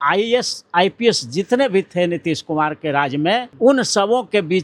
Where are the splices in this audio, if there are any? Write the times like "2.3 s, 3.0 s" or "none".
3.5 s